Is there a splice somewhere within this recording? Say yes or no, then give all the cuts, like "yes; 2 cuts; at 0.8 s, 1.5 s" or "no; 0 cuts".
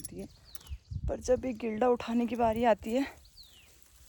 no; 0 cuts